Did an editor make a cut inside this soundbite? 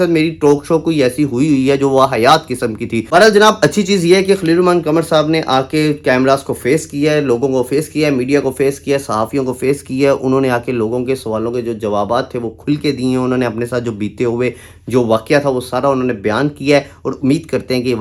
no; 0 cuts

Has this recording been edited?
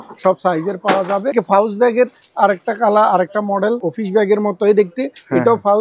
yes; 2 cuts; at 1.3 s, 3.9 s

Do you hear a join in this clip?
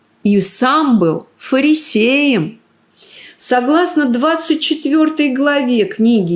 no; 0 cuts

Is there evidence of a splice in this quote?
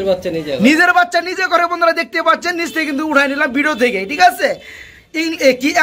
no; 0 cuts

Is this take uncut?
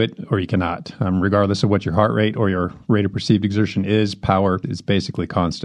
no; 1 cut; at 4.7 s

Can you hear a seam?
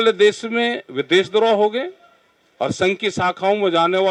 no; 0 cuts

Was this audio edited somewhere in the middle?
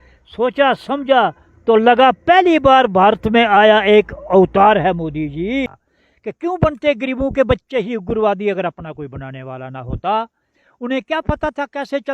yes; 1 cut; at 5.7 s

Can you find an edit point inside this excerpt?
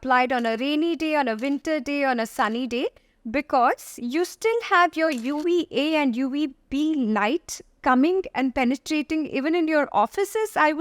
no; 0 cuts

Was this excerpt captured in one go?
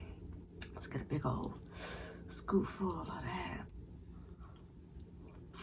no; 1 cut; at 3.7 s

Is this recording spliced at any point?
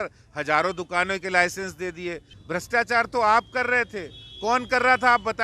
yes; 1 cut; at 2.3 s

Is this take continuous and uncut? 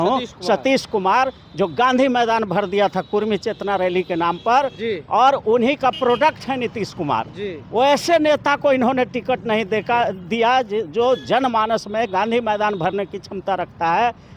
yes; 0 cuts

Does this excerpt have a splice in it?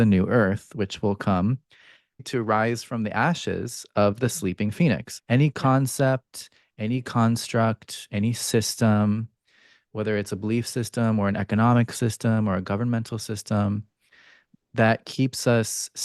yes; 2 cuts; at 2.2 s, 5.3 s

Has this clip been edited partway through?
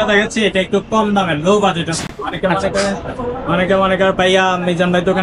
no; 0 cuts

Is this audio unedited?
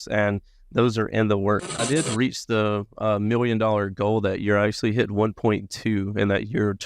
no; 1 cut; at 1.7 s

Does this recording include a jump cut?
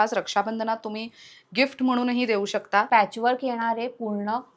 yes; 1 cut; at 2.9 s

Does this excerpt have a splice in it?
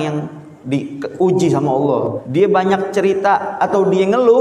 yes; 1 cut; at 2.2 s

